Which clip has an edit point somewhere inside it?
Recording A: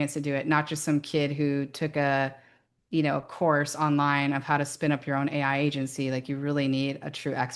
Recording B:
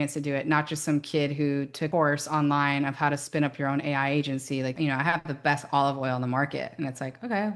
B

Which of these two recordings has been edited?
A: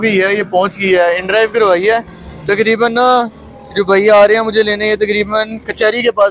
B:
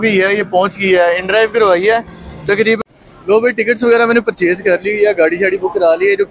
B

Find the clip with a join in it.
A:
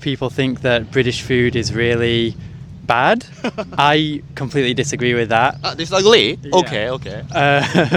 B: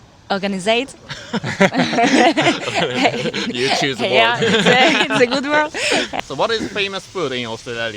B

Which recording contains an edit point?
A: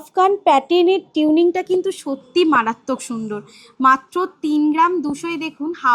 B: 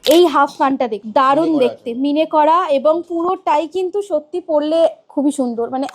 B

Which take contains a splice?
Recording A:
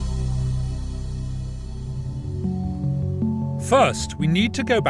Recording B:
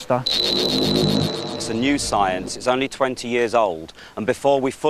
B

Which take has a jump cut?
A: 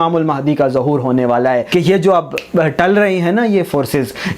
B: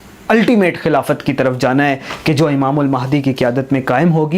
A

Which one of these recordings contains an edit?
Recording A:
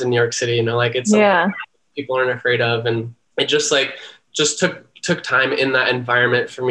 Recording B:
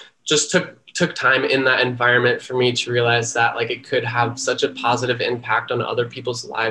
A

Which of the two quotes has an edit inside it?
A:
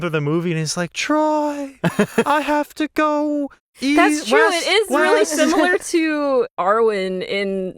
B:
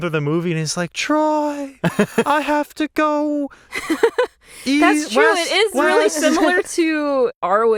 A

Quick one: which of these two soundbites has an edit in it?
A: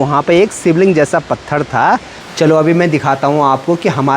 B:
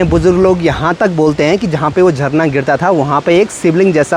A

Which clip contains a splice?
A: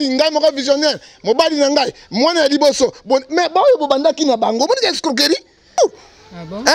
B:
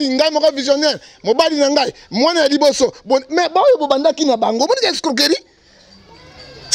A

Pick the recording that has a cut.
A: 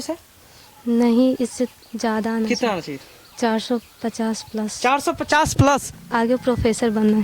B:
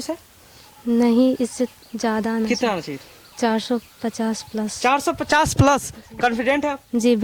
A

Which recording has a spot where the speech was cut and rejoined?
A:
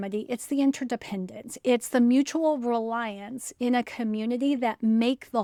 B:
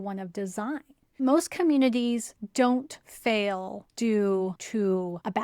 B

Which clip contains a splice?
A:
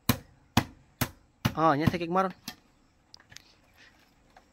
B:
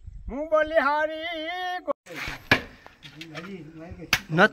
B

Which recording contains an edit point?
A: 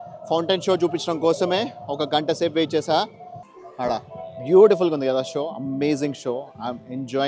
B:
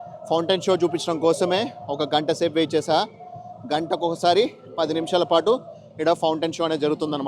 A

